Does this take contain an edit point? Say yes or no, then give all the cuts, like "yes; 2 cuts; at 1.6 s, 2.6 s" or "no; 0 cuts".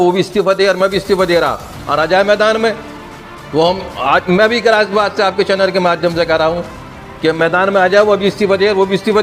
no; 0 cuts